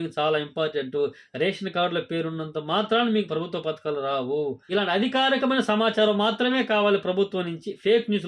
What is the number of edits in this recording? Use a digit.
1